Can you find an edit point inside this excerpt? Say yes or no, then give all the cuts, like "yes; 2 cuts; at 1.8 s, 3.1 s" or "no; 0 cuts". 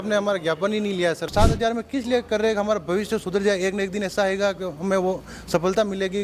yes; 1 cut; at 1.3 s